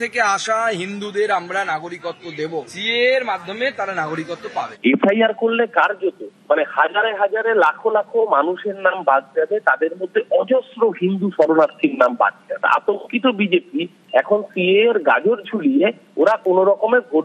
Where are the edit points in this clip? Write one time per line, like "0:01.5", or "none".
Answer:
0:02.7
0:04.7
0:12.6